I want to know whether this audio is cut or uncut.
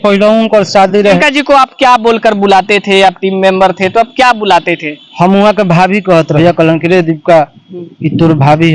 cut